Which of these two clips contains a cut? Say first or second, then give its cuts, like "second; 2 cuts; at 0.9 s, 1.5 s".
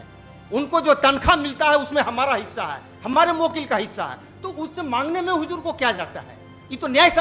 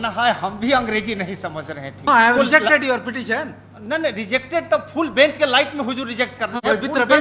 second; 1 cut; at 2.1 s